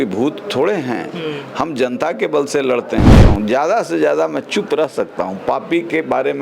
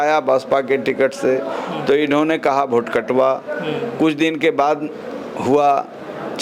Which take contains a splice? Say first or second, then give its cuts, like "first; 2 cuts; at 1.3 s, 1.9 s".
first; 1 cut; at 3.2 s